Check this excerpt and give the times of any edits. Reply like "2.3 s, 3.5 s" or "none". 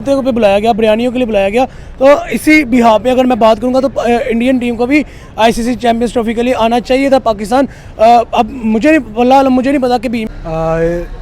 10.2 s